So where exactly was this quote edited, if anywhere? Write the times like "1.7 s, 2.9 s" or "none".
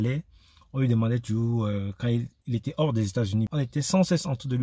3.5 s